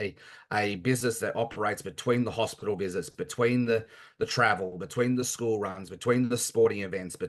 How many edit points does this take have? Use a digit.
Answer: 0